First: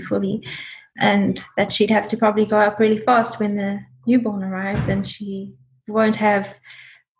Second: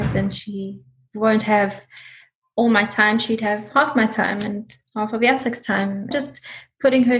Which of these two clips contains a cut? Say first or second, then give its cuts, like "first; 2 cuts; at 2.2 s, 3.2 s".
second; 1 cut; at 6.1 s